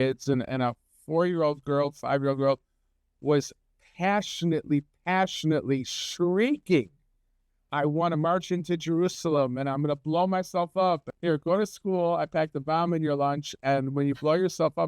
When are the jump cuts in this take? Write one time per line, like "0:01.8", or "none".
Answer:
0:11.1